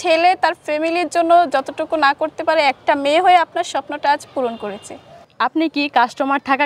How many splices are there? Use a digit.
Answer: 1